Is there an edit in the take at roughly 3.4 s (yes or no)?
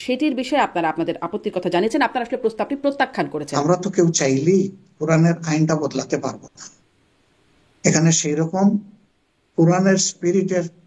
yes